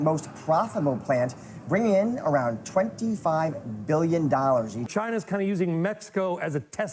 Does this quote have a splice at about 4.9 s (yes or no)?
yes